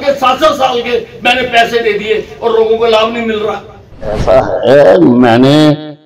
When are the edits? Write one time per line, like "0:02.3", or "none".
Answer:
0:04.2

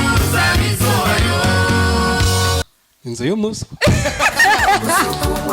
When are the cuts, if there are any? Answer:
0:02.6

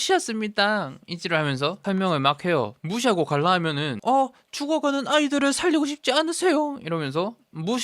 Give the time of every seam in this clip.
0:01.8

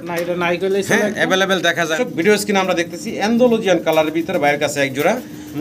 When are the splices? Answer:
0:01.9

